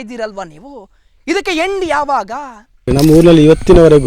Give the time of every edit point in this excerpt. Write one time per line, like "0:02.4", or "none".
0:02.9